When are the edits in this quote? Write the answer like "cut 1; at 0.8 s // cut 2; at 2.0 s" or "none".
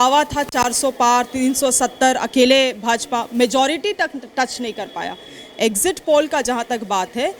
none